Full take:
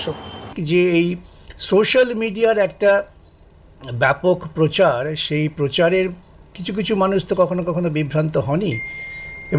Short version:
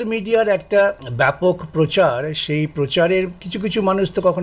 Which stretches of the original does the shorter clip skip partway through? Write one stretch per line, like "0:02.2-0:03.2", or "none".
0:03.1-0:03.9
0:06.3-0:06.6